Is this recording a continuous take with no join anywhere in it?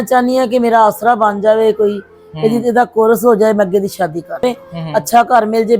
no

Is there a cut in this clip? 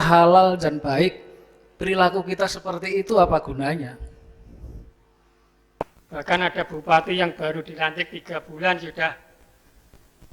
yes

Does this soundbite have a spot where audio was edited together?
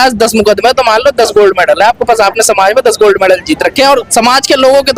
no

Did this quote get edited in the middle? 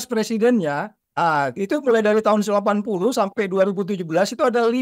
yes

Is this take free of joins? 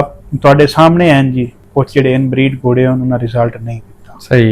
no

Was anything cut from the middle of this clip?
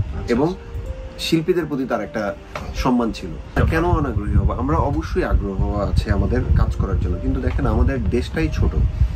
no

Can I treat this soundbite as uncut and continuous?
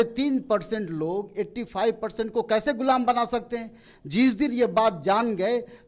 yes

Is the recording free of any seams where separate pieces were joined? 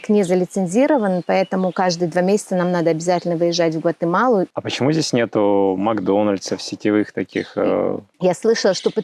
no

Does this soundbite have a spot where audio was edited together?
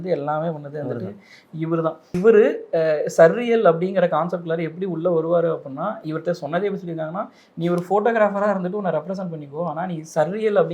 yes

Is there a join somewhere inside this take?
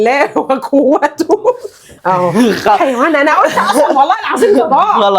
yes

